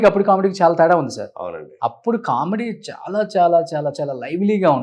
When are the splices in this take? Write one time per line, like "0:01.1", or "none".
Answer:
none